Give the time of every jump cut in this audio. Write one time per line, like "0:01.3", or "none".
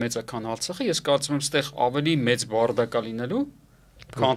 none